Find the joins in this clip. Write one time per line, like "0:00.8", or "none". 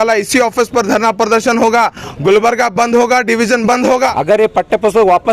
0:04.1

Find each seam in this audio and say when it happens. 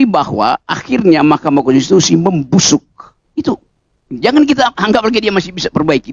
none

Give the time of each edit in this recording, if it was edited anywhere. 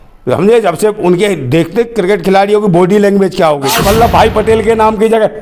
0:03.8

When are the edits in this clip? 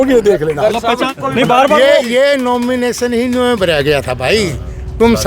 0:01.2

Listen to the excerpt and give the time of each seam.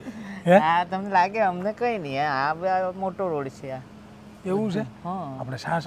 none

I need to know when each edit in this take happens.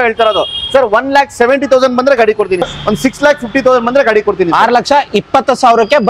0:02.7

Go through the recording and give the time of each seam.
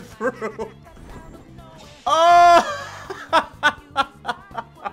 none

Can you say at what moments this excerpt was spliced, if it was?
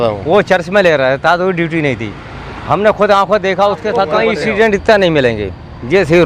0:04.1

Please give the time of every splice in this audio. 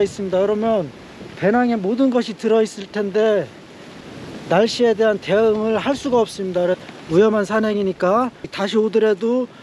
0:06.8
0:08.6

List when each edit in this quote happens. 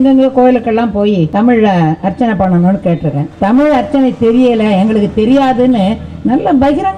0:01.3
0:03.3

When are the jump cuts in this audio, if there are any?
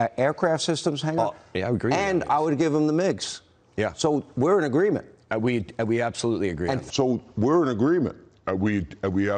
none

